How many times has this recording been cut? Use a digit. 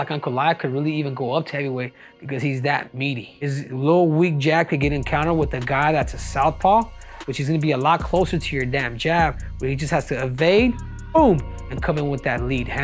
1